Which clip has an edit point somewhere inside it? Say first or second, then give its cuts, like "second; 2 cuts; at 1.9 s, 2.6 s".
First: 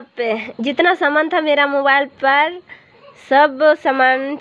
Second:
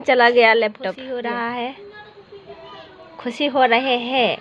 second; 1 cut; at 1.0 s